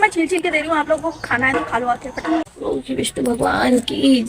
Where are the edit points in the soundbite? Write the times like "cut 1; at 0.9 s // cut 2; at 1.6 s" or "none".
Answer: cut 1; at 2.6 s